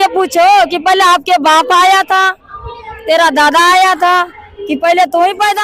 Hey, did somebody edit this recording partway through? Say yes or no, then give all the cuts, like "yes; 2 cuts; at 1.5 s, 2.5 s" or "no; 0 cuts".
no; 0 cuts